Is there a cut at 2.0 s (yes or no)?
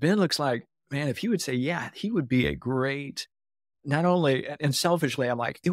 no